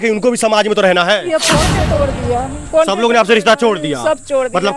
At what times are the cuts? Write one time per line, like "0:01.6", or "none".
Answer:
0:01.7